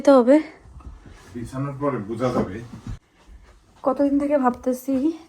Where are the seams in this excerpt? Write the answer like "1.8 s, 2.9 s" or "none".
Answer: 3.4 s